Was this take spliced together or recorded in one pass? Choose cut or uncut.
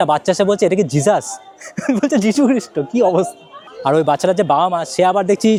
uncut